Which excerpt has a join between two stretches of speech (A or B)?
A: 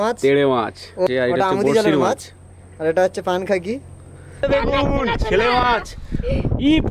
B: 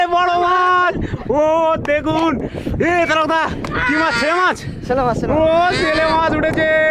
A